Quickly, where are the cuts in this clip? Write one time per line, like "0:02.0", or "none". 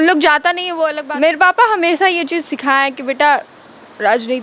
0:01.0